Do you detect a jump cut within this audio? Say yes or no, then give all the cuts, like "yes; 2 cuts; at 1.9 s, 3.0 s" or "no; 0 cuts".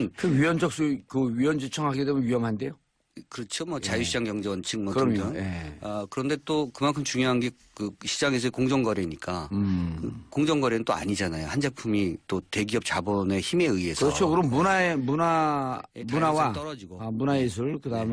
yes; 1 cut; at 8.0 s